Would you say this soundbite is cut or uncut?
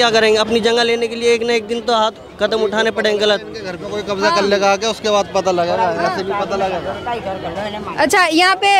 uncut